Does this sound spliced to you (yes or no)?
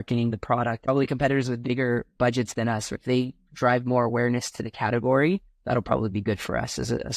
yes